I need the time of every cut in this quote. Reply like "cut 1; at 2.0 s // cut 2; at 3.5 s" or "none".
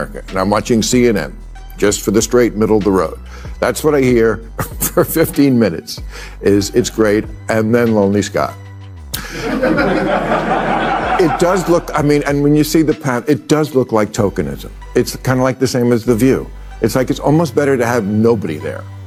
none